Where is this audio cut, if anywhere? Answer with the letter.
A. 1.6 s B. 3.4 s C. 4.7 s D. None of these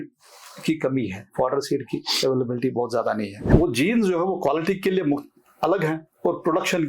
B